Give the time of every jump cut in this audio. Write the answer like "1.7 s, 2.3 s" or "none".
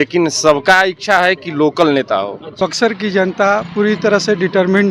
2.5 s